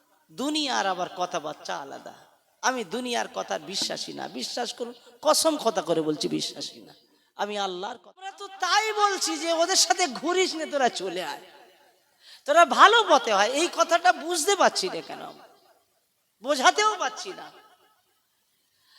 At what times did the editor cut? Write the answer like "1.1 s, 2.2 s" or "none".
8.5 s